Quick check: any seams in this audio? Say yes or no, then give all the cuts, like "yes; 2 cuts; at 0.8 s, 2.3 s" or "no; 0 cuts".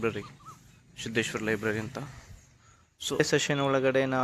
yes; 1 cut; at 3.2 s